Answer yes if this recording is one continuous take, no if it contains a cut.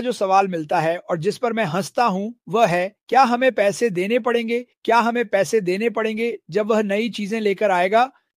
yes